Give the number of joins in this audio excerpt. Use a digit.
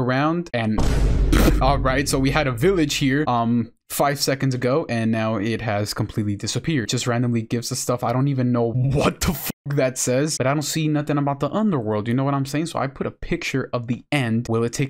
2